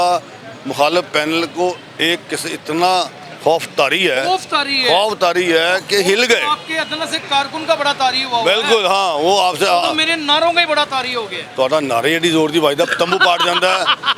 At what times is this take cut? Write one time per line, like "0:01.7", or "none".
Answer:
none